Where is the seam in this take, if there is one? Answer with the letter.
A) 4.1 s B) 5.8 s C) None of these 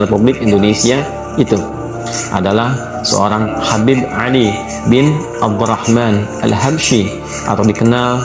C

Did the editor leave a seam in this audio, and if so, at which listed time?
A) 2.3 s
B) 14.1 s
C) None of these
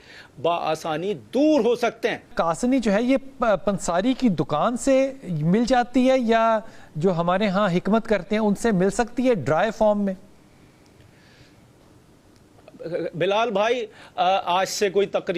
A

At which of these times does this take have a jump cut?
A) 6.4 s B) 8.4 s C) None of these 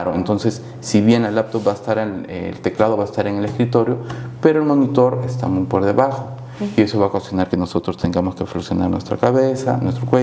C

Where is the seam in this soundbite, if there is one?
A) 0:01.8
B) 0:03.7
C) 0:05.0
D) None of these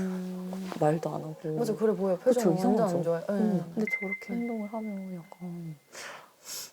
B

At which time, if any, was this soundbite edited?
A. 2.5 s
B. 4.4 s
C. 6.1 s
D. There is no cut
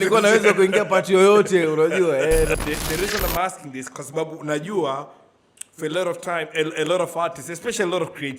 A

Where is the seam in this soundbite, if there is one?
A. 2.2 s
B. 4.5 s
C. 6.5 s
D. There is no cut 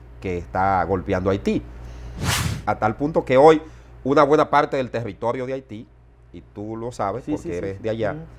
A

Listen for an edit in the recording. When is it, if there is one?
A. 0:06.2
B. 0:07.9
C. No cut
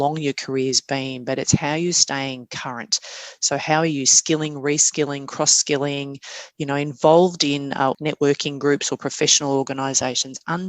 B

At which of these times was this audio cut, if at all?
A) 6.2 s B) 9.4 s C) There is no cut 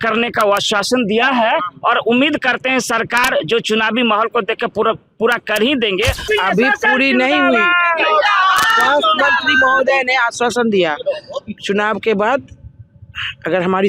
A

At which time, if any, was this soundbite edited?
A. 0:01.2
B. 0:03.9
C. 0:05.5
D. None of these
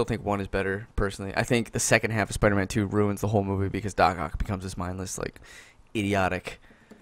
D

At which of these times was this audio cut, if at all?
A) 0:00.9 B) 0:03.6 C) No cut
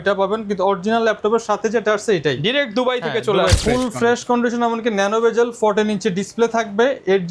B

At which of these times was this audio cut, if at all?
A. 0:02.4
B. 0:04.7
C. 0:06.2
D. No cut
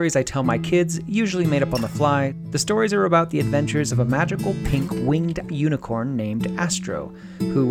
A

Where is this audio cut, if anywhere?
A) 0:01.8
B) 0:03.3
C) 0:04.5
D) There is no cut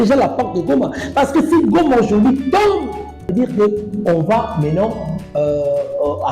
B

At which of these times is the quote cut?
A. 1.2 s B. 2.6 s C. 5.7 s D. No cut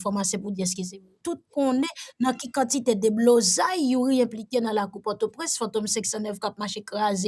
A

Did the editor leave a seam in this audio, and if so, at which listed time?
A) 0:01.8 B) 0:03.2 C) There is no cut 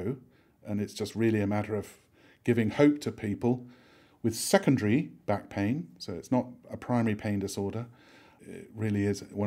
C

